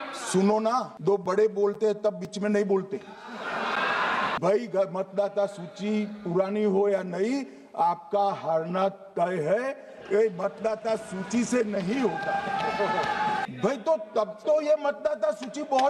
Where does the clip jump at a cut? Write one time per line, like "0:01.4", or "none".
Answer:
0:00.9
0:04.3
0:13.4